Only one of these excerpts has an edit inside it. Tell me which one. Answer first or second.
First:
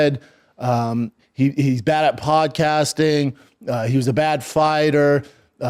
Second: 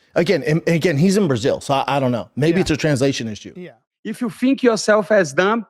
second